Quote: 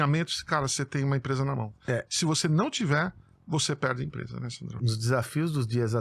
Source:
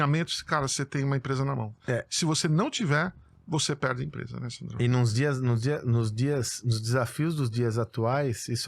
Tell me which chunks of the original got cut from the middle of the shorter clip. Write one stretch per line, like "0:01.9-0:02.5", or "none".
0:04.7-0:06.5